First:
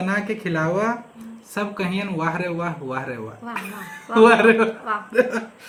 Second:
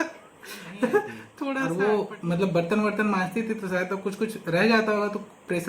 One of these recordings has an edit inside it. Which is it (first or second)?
second